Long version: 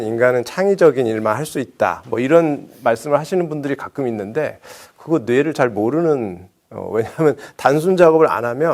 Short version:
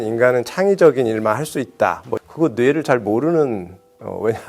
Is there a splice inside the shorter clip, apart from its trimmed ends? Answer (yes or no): yes